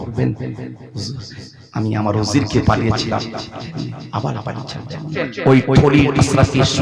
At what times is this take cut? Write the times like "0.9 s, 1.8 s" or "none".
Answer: 5.2 s